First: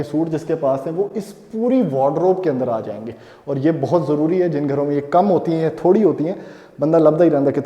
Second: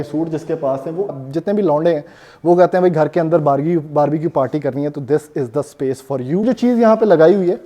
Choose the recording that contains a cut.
second; 2 cuts; at 1.2 s, 6.4 s

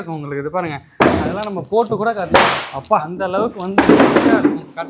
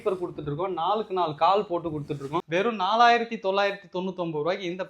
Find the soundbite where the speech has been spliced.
second; 1 cut; at 2.4 s

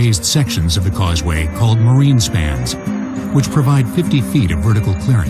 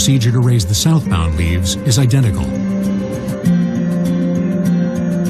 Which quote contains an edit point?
second; 1 cut; at 3.2 s

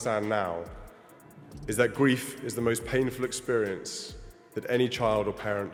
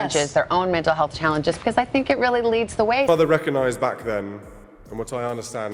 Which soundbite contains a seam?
second; 1 cut; at 3.1 s

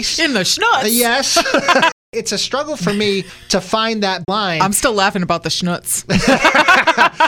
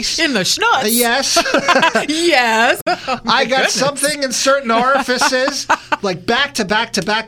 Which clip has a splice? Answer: first; 3 cuts; at 2.0 s, 3.4 s, 4.3 s

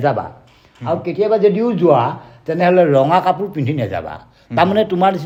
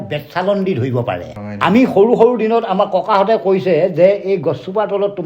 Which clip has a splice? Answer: second; 1 cut; at 1.4 s

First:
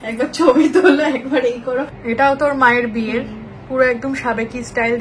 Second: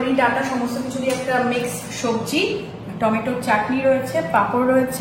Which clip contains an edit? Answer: first; 1 cut; at 2.0 s

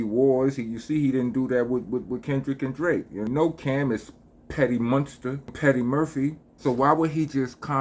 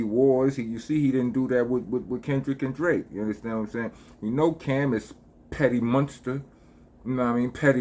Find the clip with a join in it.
first; 3 cuts; at 3.2 s, 5.5 s, 6.5 s

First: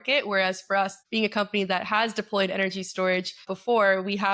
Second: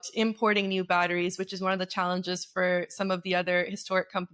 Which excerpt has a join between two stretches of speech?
first; 2 cuts; at 1.0 s, 3.5 s

